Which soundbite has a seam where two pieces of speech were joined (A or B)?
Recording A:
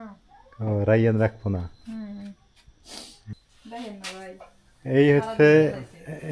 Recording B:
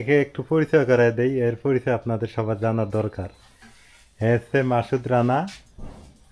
A